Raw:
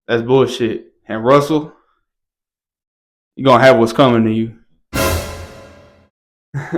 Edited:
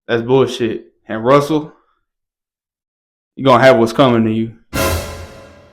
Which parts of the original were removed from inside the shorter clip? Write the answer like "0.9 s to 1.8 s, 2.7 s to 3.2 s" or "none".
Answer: 4.6 s to 4.8 s